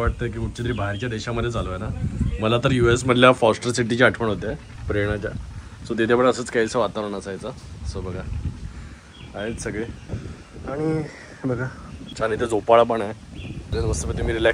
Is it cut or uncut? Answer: uncut